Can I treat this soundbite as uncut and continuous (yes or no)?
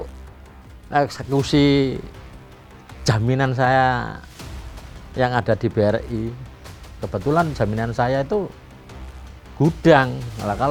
yes